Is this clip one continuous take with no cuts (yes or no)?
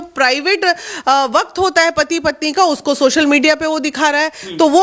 yes